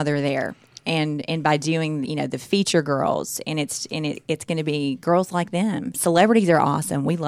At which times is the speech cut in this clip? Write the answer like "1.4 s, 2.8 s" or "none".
6.0 s